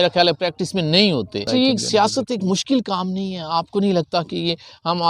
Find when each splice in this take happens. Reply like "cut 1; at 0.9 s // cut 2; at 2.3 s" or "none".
cut 1; at 1.5 s

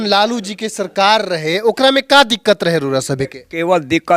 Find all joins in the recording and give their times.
none

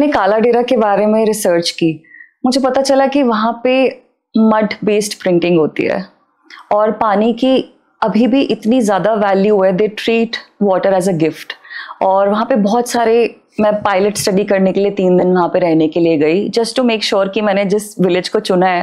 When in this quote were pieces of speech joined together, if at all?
none

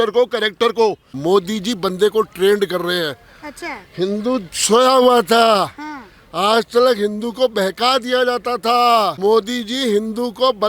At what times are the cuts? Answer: cut 1; at 1.1 s // cut 2; at 9.1 s

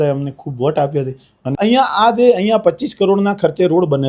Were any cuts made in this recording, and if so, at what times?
cut 1; at 1.5 s

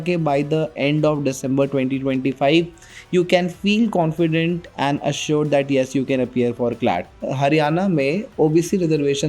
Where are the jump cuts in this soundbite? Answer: cut 1; at 7.2 s

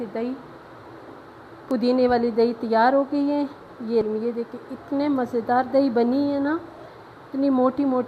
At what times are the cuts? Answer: cut 1; at 4.0 s

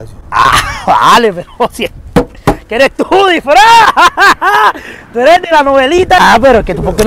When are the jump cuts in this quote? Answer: cut 1; at 6.2 s

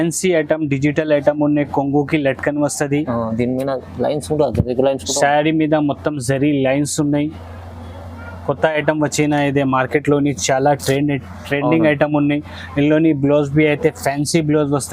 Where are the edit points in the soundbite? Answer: none

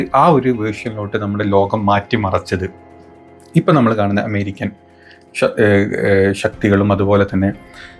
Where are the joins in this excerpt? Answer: none

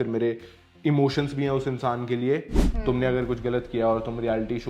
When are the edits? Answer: cut 1; at 2.6 s

